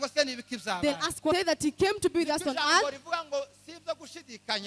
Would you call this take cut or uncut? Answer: cut